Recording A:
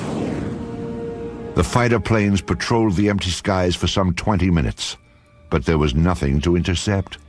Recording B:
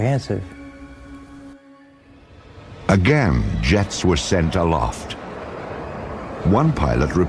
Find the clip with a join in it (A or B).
A